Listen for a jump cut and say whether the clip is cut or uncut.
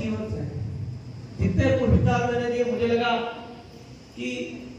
uncut